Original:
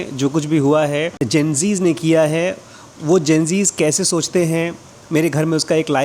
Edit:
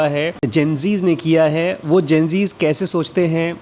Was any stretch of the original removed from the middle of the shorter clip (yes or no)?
yes